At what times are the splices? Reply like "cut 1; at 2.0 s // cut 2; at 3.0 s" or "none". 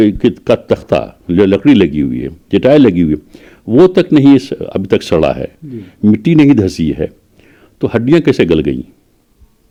none